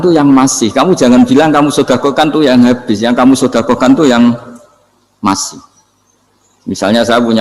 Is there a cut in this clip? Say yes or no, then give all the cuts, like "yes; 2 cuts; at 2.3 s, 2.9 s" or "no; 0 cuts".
no; 0 cuts